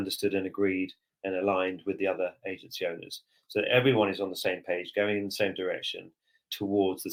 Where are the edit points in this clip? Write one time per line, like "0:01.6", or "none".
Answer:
none

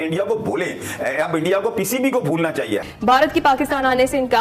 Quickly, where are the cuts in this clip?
0:02.8

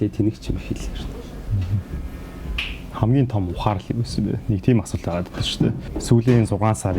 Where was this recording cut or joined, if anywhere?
0:05.9

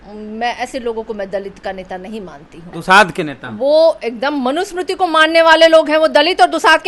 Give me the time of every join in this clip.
0:02.8

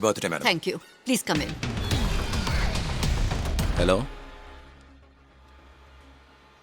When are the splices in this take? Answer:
0:03.7

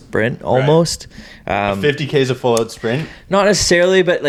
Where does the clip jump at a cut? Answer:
none

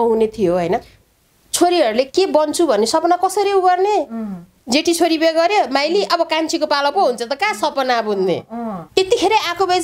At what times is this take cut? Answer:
0:01.0
0:08.8

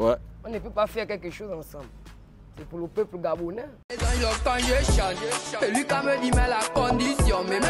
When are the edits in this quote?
0:03.8

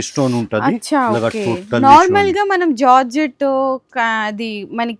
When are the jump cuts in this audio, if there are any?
none

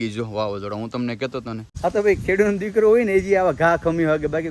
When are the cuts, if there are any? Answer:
0:01.6

